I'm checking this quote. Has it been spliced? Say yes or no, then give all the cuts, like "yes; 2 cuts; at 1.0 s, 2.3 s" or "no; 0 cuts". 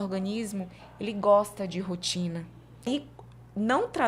yes; 1 cut; at 2.9 s